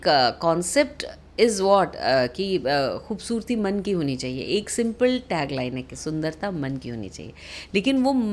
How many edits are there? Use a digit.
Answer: 0